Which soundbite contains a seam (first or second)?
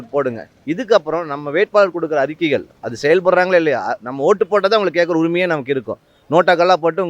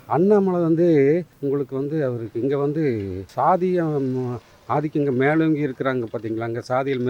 second